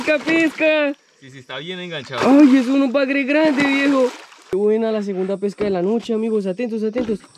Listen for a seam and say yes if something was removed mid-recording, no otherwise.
yes